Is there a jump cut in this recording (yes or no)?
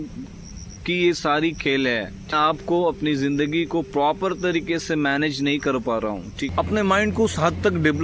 yes